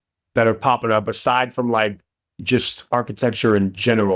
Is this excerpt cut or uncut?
uncut